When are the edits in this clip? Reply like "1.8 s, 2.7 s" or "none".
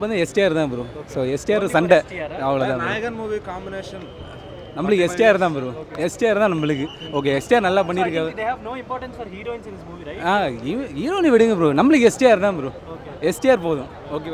none